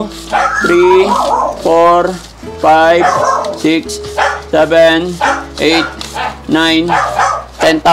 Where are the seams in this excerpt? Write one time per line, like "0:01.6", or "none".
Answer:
none